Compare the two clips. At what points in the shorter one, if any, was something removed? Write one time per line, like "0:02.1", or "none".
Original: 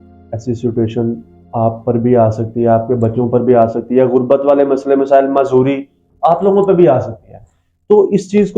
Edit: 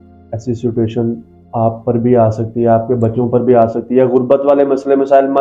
none

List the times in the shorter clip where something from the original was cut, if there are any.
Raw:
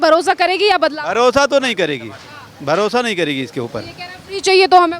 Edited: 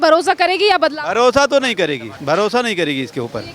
0:02.1

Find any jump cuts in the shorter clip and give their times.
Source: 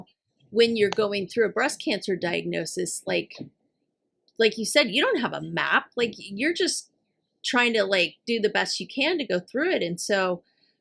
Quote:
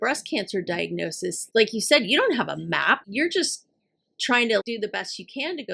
0:01.4
0:03.0
0:04.6

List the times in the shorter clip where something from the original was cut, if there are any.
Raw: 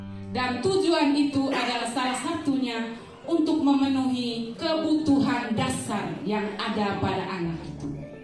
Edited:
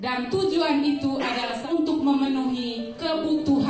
0:01.6

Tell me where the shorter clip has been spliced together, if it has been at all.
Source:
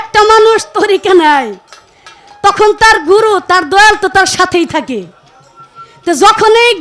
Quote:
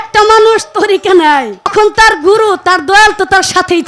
0:01.7

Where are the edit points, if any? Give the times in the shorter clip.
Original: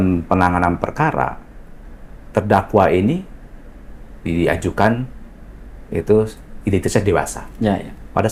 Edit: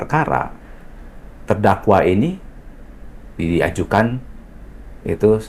none

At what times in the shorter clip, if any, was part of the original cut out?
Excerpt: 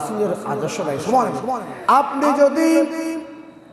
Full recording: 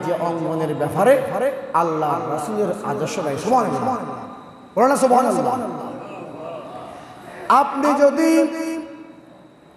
0:01.7

